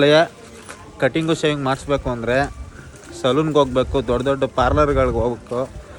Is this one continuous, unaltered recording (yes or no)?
yes